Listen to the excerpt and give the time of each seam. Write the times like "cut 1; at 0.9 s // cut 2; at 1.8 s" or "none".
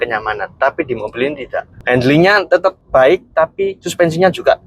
cut 1; at 1.7 s // cut 2; at 2.5 s // cut 3; at 3.8 s